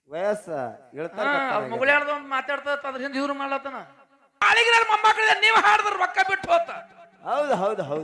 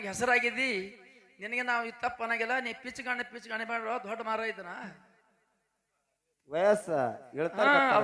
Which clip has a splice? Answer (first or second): first